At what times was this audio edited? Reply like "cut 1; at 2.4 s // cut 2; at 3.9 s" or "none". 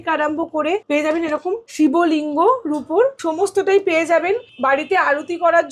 cut 1; at 0.8 s // cut 2; at 1.7 s // cut 3; at 3.2 s // cut 4; at 4.5 s